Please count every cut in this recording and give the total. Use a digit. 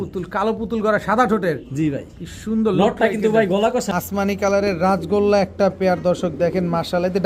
1